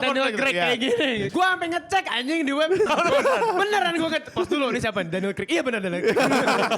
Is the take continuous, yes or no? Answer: no